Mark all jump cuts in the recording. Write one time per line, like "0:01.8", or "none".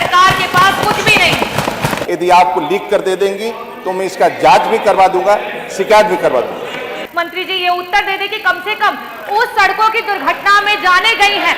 0:02.0
0:07.0